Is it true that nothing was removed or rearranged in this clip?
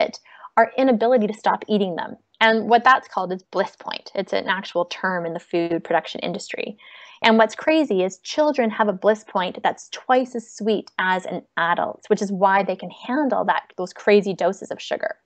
yes; 0 cuts

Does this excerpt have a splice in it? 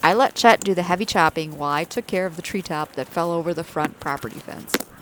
no; 0 cuts

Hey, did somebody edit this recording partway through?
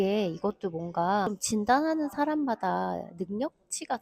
yes; 1 cut; at 1.3 s

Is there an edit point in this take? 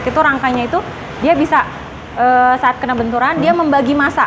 no; 0 cuts

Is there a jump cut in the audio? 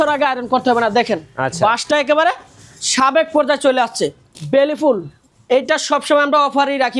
yes; 1 cut; at 4.3 s

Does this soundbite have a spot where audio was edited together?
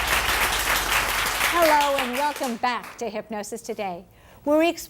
no; 0 cuts

